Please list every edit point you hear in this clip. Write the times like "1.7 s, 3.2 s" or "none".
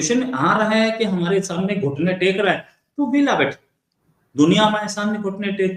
none